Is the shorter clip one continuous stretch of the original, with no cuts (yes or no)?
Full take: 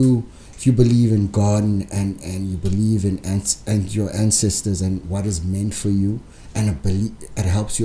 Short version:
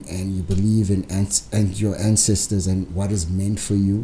yes